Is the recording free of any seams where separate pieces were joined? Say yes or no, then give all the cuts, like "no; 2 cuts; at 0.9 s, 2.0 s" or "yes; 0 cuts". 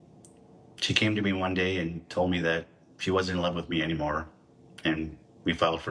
yes; 0 cuts